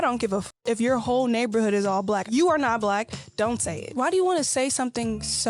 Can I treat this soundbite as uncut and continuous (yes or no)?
yes